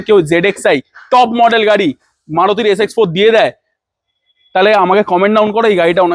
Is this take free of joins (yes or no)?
yes